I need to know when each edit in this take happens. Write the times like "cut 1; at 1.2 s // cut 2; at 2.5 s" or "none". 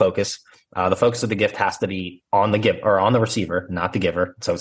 none